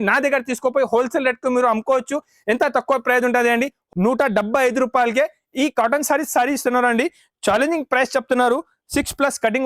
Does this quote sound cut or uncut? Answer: cut